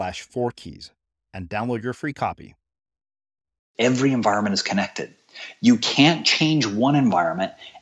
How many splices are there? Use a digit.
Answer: 1